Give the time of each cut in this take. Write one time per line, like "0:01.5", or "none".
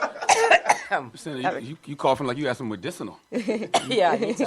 0:01.2

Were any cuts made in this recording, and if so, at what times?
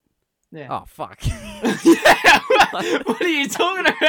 0:01.6

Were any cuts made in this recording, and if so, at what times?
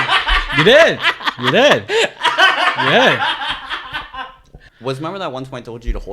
0:04.6

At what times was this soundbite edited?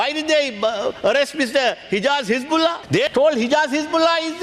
0:02.9

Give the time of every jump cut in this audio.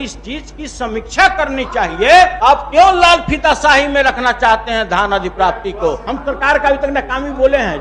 0:02.3
0:06.1

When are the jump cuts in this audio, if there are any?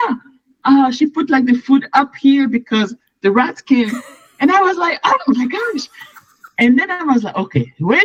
none

